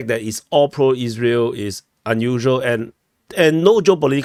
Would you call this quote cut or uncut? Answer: uncut